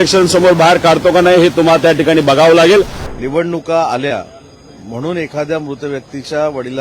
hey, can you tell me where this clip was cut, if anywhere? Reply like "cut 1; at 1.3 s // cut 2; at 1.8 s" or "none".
cut 1; at 3.0 s